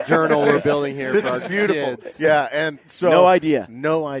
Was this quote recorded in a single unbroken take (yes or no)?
yes